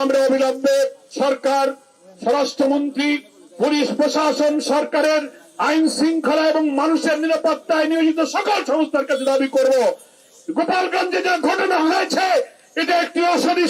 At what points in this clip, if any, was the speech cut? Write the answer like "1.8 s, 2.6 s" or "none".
1.0 s